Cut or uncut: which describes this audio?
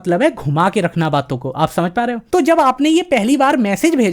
cut